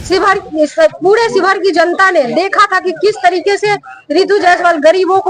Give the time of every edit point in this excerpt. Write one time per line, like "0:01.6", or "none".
none